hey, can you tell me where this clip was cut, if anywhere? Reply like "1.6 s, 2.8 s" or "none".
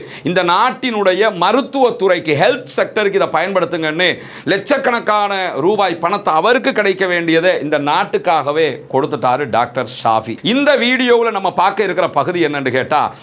10.3 s